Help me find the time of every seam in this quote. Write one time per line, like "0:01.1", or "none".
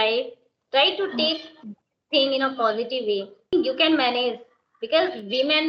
0:03.5